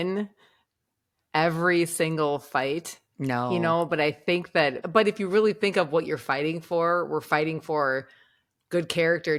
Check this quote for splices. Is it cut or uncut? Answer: uncut